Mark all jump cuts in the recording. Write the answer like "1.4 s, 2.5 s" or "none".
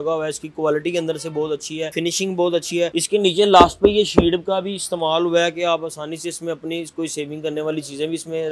1.9 s, 3.0 s